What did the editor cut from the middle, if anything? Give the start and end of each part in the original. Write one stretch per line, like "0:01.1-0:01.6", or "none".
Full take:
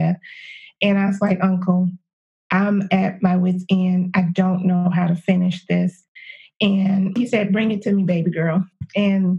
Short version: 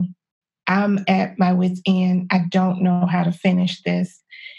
none